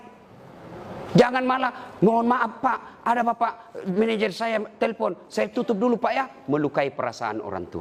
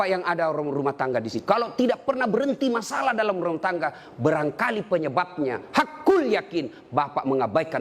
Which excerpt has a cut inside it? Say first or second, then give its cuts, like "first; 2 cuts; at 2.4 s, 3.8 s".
second; 1 cut; at 1.4 s